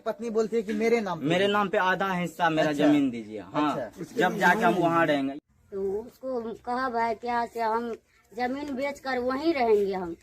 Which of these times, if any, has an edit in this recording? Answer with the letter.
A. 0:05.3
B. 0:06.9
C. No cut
A